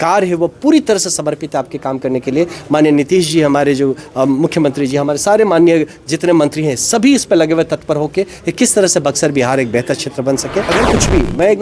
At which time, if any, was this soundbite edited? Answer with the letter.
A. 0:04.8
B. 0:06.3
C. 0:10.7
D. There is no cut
C